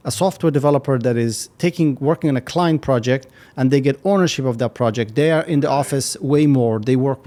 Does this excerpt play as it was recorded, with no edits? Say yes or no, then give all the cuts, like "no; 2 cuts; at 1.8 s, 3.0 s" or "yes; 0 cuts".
yes; 0 cuts